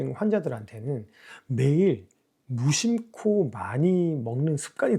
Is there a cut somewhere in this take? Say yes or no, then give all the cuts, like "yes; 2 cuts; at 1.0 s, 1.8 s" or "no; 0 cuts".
no; 0 cuts